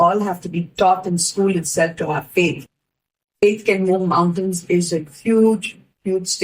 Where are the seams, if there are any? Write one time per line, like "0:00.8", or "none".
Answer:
none